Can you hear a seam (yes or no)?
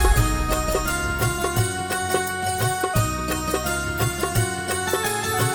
yes